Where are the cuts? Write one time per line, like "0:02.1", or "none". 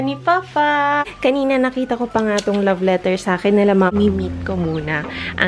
0:01.5
0:03.9